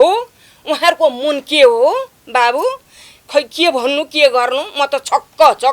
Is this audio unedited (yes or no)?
yes